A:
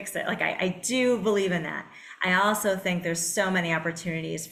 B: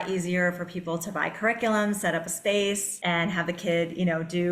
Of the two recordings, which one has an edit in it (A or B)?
B